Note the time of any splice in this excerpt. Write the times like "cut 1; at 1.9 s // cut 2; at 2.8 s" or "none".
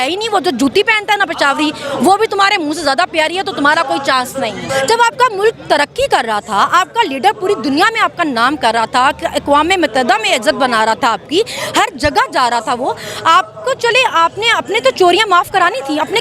cut 1; at 4.6 s